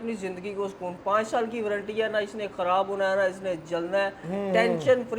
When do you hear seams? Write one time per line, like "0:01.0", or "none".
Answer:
none